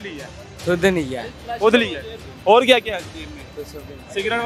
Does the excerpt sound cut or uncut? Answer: uncut